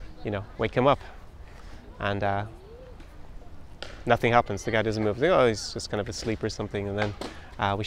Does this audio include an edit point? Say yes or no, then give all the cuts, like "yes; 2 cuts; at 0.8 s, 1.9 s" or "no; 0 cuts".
no; 0 cuts